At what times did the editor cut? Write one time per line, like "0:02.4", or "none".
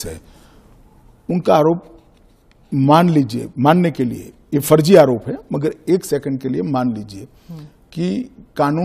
none